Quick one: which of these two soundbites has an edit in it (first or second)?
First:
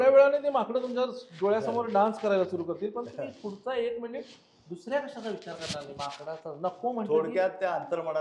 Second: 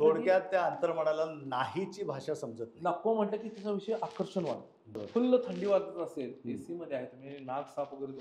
second